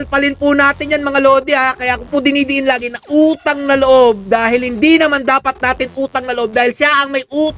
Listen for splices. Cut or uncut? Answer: uncut